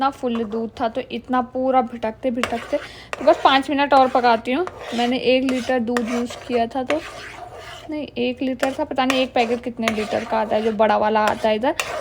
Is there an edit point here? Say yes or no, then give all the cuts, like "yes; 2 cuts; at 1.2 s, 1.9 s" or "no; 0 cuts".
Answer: no; 0 cuts